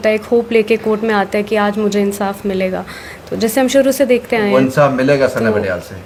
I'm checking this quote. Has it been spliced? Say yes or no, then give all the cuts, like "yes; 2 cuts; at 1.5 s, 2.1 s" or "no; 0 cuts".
no; 0 cuts